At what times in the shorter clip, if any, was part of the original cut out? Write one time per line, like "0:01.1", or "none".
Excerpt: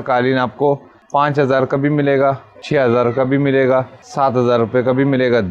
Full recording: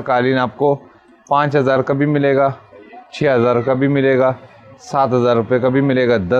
0:00.9
0:02.5
0:04.0